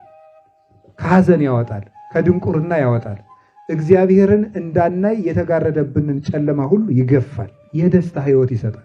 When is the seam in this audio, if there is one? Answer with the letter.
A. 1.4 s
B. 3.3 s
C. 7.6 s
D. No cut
C